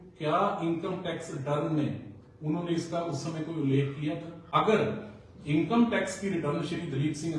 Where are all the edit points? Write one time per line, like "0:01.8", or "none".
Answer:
0:04.4